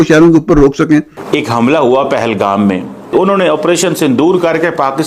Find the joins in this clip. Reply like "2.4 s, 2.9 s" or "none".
1.2 s